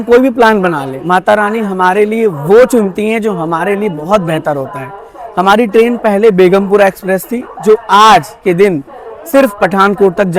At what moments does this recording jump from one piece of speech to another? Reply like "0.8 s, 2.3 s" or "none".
none